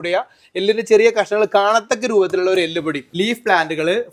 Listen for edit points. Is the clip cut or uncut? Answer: cut